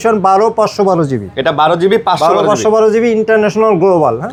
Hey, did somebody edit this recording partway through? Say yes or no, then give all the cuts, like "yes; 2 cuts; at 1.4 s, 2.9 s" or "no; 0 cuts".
no; 0 cuts